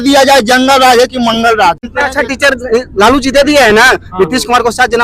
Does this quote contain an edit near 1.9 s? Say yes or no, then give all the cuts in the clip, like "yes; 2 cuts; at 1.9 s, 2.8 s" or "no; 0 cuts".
yes; 1 cut; at 1.9 s